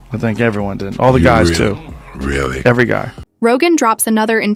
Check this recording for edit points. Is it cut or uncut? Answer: uncut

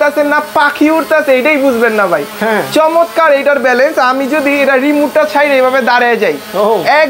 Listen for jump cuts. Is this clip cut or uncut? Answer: uncut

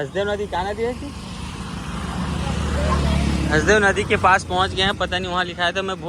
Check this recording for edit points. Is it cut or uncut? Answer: uncut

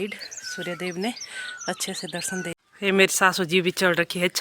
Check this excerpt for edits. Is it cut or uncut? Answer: cut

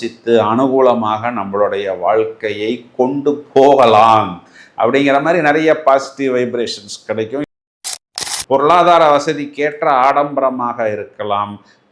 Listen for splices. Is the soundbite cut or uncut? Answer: cut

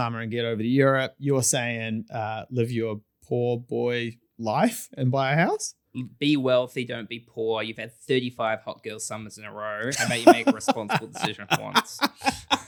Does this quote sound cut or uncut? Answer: uncut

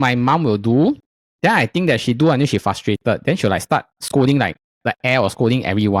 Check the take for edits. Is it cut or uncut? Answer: uncut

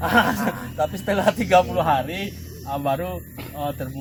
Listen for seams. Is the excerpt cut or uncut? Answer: uncut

